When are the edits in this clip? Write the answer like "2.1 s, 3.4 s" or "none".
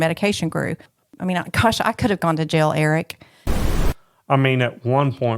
1.1 s, 3.7 s